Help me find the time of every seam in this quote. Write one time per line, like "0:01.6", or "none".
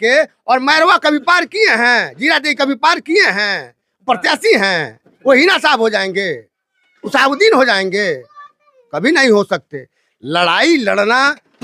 none